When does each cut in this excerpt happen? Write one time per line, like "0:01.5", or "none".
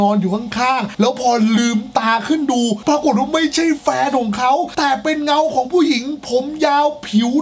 0:02.8